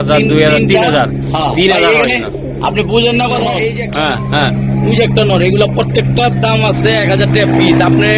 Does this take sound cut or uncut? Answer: cut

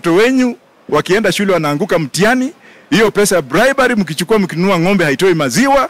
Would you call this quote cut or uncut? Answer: uncut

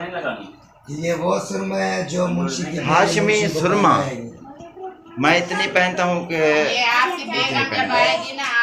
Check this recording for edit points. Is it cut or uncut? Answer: uncut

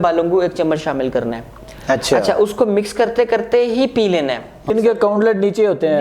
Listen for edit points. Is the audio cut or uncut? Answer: cut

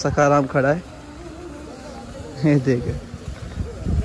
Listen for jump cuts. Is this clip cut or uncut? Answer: uncut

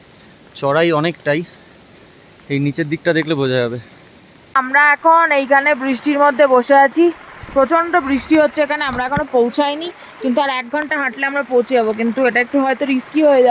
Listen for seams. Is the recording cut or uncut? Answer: cut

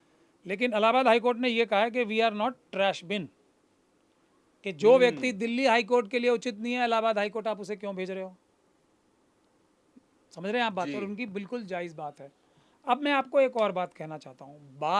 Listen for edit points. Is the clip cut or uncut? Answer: uncut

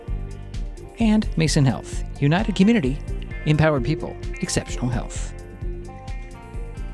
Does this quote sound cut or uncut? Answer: cut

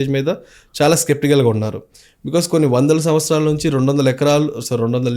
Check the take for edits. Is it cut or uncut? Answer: uncut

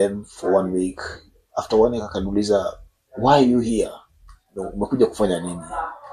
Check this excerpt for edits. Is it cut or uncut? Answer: uncut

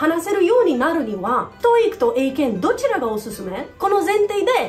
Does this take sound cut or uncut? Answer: uncut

